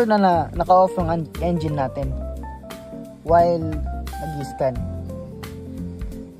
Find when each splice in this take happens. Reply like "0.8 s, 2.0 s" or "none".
none